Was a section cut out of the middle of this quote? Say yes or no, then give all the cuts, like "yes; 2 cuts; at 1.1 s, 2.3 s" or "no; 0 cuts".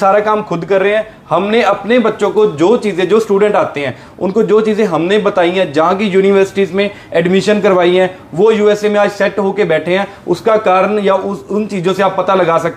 no; 0 cuts